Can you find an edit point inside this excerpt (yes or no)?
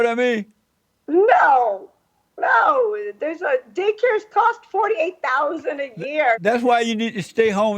yes